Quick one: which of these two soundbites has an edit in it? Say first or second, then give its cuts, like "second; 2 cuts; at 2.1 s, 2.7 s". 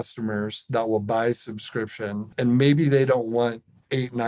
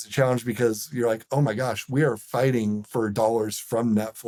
first; 1 cut; at 2.2 s